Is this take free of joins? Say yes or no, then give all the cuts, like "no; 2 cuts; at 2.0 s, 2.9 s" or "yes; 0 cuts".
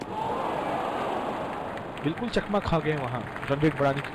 yes; 0 cuts